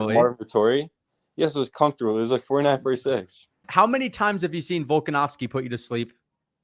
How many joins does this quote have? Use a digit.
1